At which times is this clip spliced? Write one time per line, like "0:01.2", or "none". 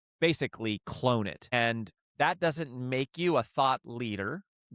0:01.5

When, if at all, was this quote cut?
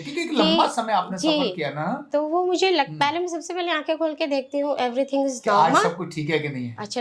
none

